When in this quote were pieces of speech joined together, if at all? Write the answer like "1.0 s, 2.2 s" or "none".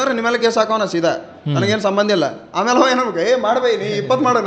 none